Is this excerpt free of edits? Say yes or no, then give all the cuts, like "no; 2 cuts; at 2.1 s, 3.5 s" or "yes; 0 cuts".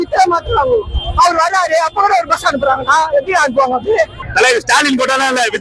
no; 1 cut; at 4.2 s